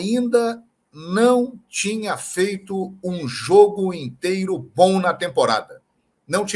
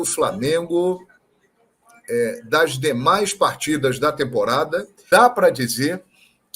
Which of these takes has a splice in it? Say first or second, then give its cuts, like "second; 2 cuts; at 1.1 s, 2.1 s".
second; 1 cut; at 4.9 s